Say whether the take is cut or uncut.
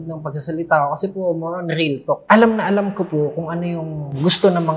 cut